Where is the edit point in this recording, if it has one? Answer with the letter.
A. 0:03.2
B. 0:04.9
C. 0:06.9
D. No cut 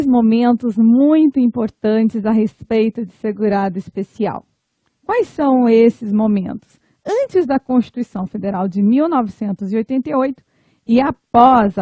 B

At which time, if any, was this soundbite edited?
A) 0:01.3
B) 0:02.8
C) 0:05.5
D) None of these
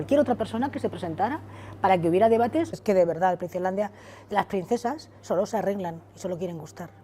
B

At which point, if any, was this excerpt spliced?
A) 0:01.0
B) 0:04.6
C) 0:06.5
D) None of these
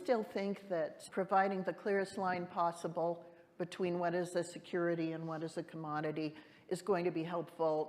A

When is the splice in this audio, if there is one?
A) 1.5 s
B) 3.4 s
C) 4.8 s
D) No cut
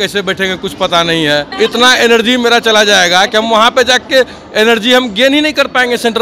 A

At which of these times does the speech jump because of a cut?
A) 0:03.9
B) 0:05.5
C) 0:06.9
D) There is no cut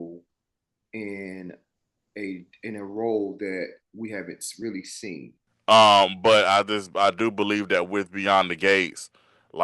B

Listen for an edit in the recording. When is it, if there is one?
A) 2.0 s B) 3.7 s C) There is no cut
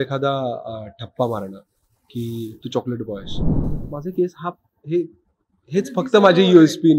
B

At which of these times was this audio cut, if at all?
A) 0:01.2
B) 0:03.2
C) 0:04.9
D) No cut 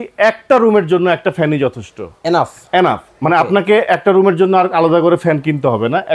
D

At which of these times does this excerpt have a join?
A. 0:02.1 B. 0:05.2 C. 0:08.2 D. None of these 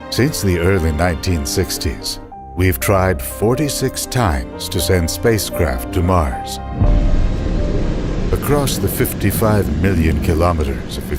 C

